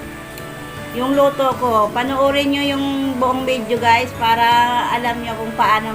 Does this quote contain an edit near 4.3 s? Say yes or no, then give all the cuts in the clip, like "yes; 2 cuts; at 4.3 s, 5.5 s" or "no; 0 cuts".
no; 1 cut; at 0.9 s